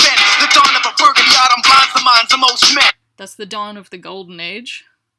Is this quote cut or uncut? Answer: uncut